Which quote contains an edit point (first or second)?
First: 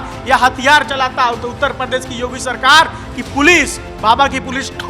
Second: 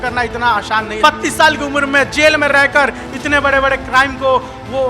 second